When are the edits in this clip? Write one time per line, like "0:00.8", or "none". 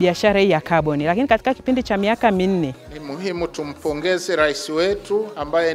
0:02.9